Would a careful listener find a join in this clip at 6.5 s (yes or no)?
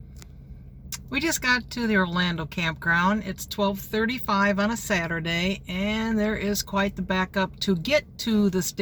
no